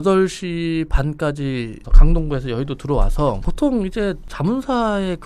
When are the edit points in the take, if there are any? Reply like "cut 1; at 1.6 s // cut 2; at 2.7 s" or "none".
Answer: cut 1; at 1.9 s // cut 2; at 3.5 s